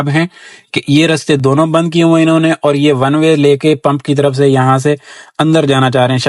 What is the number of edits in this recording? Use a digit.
0